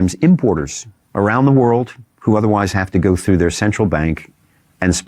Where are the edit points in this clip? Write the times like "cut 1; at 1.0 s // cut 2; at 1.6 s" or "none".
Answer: none